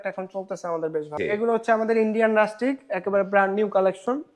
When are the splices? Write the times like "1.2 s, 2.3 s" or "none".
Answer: 1.1 s